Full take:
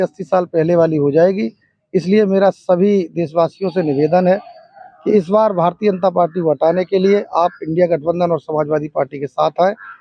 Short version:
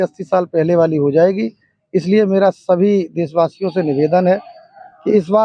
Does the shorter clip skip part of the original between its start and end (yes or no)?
no